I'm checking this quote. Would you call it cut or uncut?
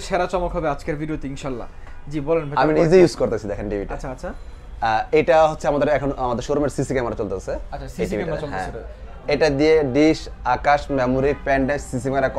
uncut